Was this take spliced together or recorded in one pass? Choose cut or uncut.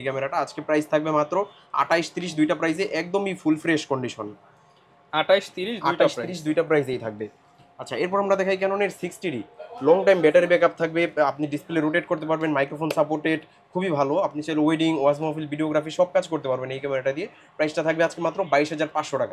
uncut